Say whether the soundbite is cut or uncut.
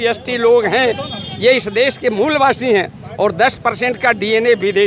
uncut